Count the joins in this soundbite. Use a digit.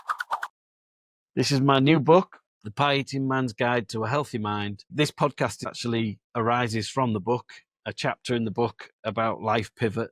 1